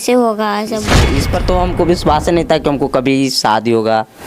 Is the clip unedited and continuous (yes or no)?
no